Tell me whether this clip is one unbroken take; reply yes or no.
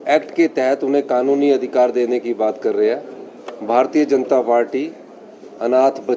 yes